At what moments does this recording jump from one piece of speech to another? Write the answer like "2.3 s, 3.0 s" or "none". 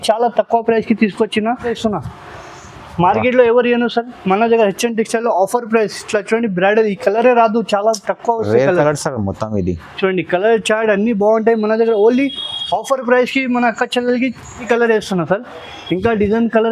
1.7 s, 14.6 s